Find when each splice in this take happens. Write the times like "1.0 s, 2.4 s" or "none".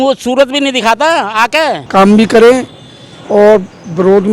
1.8 s